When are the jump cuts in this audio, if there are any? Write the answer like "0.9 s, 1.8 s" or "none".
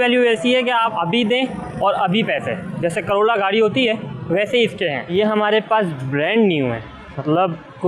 0.9 s, 5.1 s